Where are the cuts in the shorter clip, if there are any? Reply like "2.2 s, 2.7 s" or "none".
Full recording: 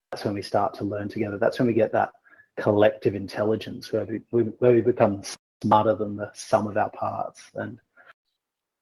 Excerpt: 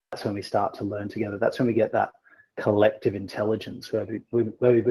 none

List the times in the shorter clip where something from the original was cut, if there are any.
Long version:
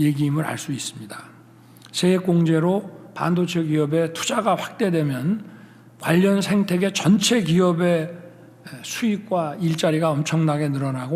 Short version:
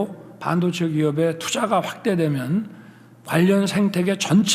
none

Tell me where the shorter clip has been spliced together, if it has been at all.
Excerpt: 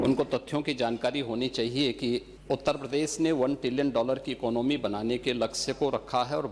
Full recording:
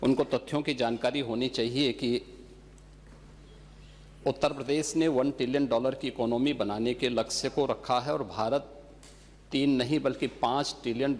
2.3 s

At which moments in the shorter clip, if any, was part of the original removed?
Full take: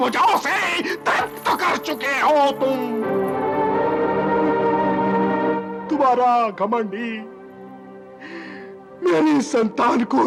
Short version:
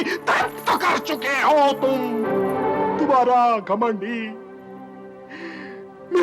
2.9 s

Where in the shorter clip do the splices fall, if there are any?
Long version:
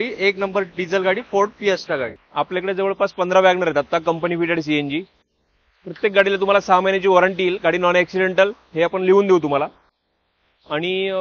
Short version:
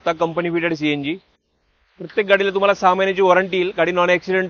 none

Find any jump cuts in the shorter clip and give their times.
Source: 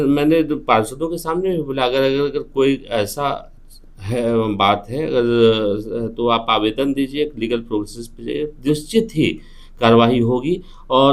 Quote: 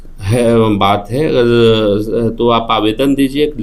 none

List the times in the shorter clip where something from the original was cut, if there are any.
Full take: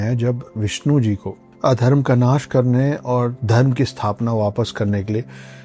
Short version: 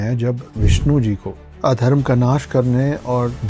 none

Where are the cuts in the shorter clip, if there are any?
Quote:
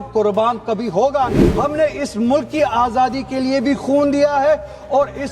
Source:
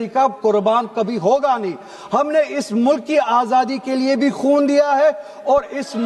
1.4 s

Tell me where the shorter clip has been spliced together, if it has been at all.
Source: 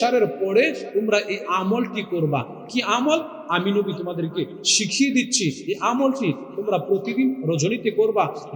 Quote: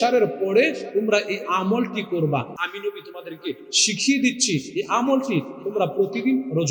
2.6 s

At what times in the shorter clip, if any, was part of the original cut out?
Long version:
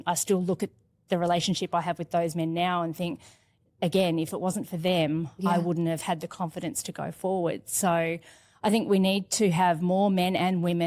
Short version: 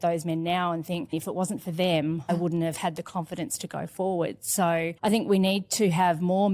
1.1 s, 2.3 s, 4.9 s

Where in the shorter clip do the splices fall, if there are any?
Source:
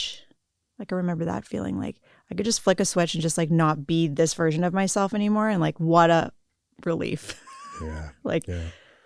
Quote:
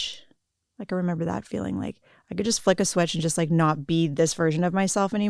none

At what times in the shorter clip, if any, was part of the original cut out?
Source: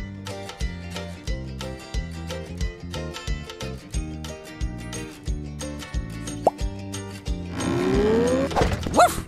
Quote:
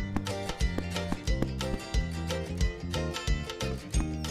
none

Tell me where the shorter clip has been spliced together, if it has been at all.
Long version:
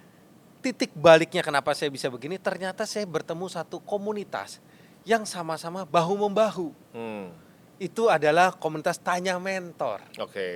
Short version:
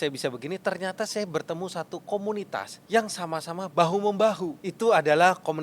2.8 s, 4.6 s

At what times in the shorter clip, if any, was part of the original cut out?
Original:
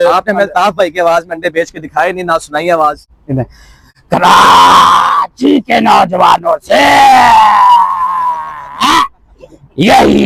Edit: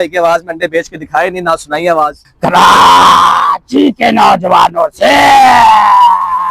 2.2 s

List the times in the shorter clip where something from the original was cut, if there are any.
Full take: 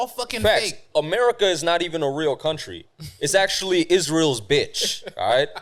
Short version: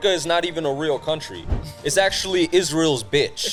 none

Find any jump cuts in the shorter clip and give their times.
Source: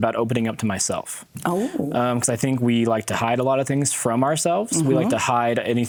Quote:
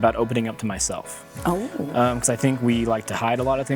none

